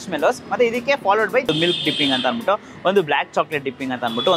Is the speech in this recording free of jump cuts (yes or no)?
no